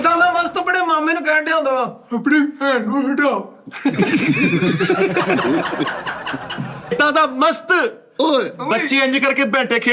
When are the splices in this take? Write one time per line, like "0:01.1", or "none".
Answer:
0:06.9